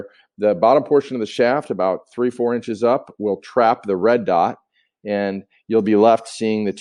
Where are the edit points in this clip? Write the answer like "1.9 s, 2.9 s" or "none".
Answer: none